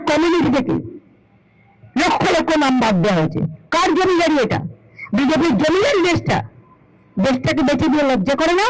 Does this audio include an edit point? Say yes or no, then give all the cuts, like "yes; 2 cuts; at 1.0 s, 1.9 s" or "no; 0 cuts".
no; 0 cuts